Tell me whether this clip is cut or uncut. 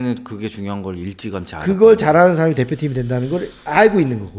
uncut